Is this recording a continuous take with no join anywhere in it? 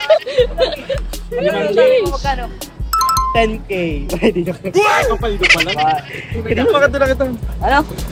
yes; 0 cuts

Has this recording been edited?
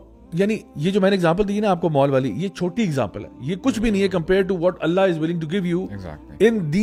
no; 0 cuts

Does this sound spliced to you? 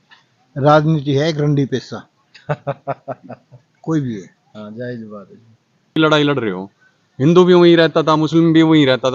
yes; 1 cut; at 5.9 s

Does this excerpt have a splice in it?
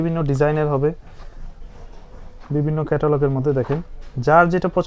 no; 0 cuts

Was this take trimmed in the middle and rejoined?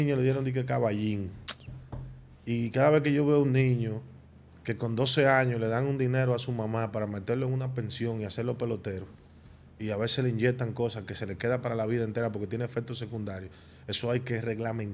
no; 0 cuts

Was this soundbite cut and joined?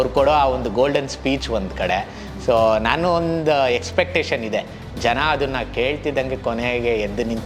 no; 0 cuts

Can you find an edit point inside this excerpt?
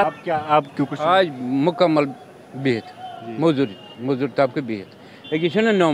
no; 0 cuts

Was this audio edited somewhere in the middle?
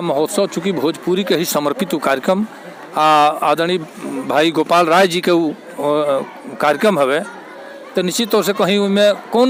no; 0 cuts

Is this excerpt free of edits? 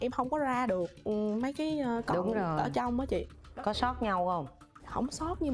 yes; 0 cuts

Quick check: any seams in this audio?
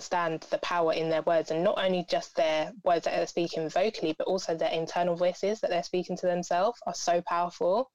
no; 0 cuts

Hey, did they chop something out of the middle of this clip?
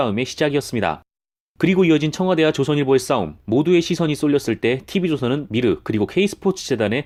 no; 0 cuts

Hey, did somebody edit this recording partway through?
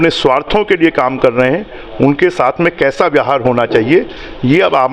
no; 0 cuts

